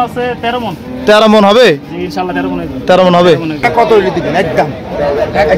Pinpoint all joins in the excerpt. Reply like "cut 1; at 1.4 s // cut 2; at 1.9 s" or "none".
cut 1; at 3.7 s